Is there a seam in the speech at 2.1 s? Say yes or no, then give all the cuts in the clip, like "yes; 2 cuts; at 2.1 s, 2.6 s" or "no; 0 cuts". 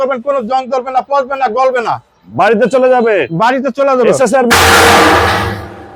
no; 0 cuts